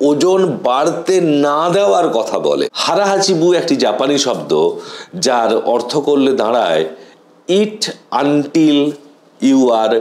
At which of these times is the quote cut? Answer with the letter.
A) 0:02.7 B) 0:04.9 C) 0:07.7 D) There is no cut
A